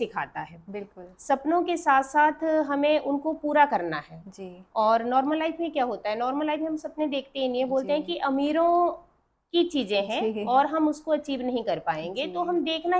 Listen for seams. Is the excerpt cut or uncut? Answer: uncut